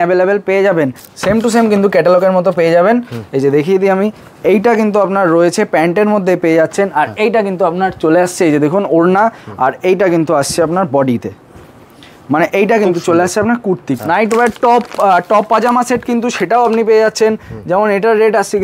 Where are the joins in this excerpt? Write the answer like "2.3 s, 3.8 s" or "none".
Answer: 1.1 s, 13.9 s